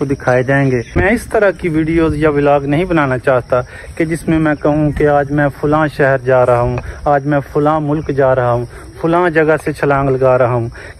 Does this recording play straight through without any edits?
no; 1 cut; at 1.0 s

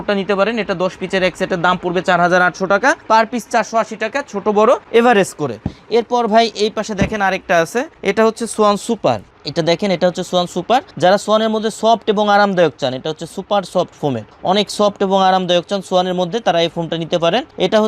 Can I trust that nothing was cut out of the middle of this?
yes; 0 cuts

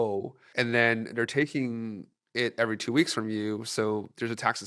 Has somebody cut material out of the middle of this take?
no; 0 cuts

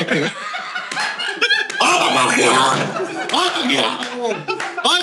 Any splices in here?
no; 0 cuts

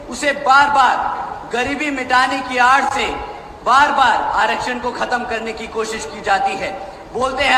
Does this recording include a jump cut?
no; 0 cuts

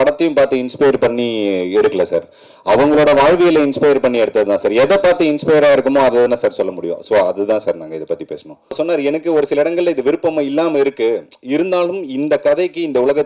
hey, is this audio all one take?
no; 1 cut; at 8.8 s

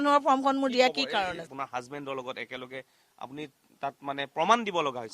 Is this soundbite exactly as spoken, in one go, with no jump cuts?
no; 1 cut; at 1.5 s

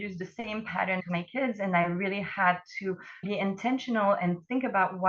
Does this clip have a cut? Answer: yes; 2 cuts; at 1.0 s, 3.2 s

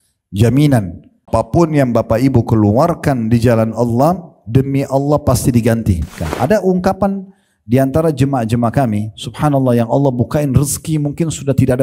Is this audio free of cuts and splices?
no; 2 cuts; at 1.3 s, 6.2 s

